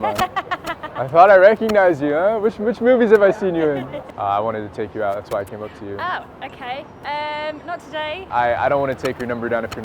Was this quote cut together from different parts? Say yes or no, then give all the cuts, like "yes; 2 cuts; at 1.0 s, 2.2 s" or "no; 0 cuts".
yes; 2 cuts; at 4.0 s, 8.3 s